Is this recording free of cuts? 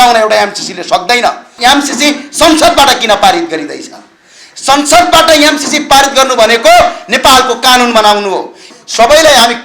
no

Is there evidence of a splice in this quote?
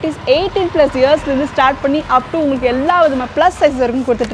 no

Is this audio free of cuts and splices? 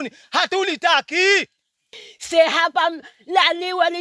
no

